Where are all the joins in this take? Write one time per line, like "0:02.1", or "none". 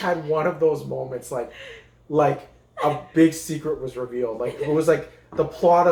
none